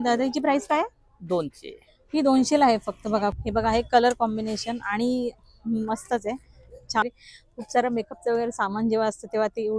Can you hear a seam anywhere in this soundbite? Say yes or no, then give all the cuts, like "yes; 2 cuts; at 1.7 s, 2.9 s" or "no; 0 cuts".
yes; 2 cuts; at 3.3 s, 7.0 s